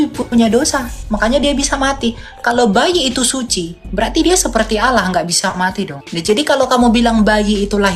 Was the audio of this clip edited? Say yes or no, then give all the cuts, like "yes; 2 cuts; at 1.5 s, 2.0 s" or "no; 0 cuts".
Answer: no; 0 cuts